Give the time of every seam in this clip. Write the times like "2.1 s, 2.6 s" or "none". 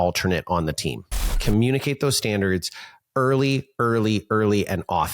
1.3 s